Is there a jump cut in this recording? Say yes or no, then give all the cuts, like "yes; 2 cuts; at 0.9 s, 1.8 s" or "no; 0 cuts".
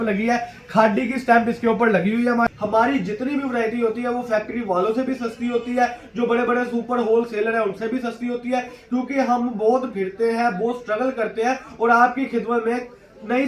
yes; 1 cut; at 2.5 s